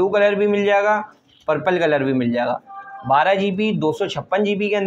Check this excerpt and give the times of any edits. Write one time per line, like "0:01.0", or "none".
none